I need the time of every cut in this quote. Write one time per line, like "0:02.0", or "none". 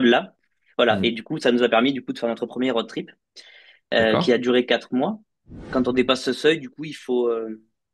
0:05.6